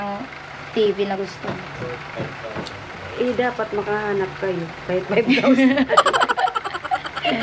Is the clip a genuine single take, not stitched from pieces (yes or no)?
yes